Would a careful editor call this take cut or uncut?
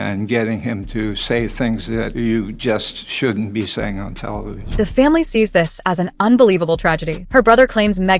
uncut